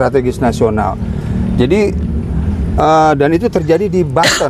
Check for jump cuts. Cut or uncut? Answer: uncut